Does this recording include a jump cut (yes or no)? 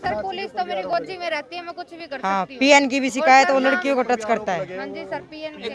no